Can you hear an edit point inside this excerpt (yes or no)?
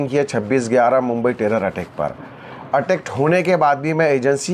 no